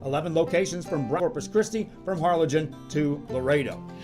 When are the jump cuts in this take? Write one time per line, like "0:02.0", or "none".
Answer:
0:01.2